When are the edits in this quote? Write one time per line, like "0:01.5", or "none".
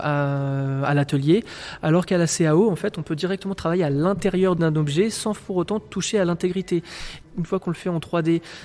0:04.6
0:07.2

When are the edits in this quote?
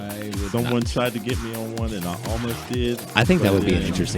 0:03.1

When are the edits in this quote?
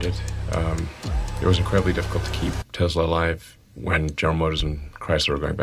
none

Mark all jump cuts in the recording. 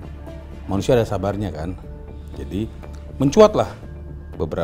none

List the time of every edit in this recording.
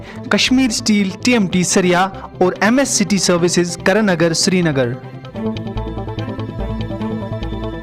0:05.3

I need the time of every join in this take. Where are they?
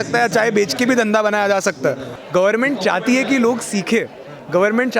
0:02.1

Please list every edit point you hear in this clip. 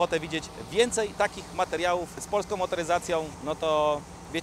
0:02.2
0:03.3

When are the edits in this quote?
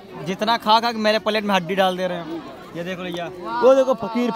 none

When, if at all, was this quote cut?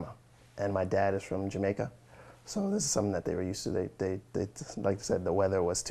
none

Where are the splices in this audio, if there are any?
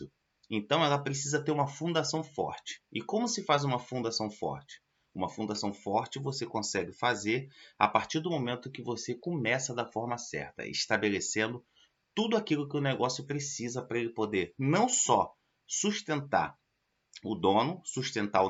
none

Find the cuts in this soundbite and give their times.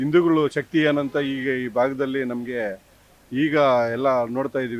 none

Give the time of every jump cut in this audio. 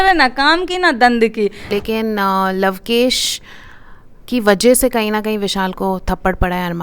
0:01.7

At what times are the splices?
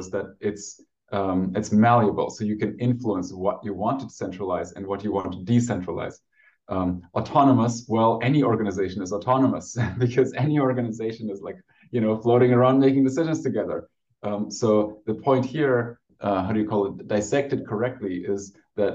0:16.1

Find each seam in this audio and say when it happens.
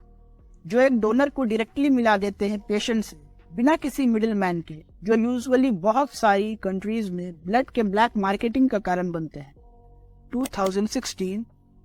none

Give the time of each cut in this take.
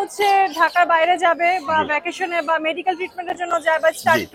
none

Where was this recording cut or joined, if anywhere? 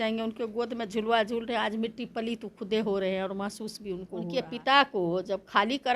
0:04.2

